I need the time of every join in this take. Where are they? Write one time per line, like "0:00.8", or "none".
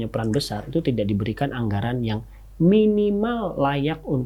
none